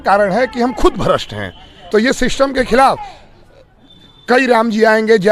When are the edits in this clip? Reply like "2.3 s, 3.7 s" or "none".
none